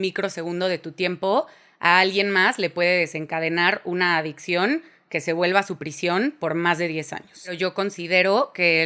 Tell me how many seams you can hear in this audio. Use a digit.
1